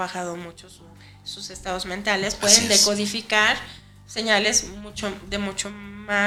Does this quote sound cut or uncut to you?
uncut